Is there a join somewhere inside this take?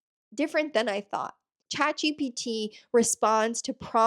yes; 1 cut; at 1.4 s

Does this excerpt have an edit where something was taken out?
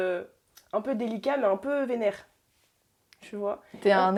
no; 0 cuts

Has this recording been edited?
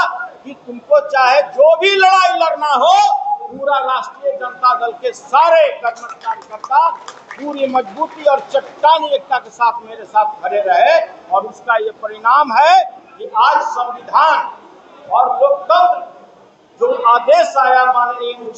no; 0 cuts

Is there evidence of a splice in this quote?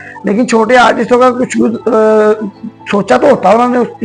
no; 0 cuts

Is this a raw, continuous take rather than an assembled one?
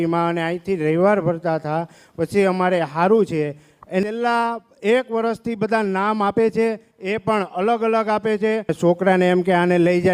no; 2 cuts; at 4.0 s, 8.7 s

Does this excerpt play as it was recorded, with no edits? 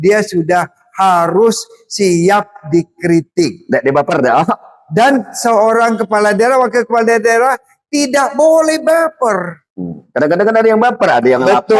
yes; 0 cuts

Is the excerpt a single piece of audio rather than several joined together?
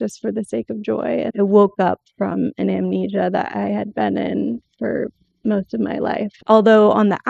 no; 2 cuts; at 1.3 s, 6.3 s

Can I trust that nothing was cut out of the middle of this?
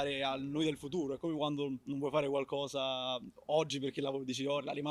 yes; 0 cuts

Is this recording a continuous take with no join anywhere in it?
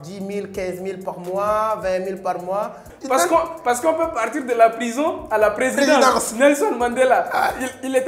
no; 1 cut; at 2.9 s

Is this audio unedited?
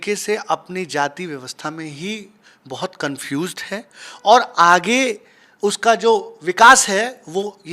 yes; 0 cuts

